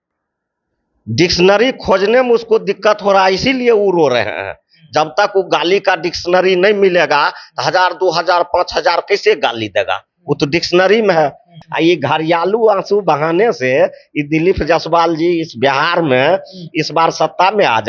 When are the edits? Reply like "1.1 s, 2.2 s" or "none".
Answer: 11.5 s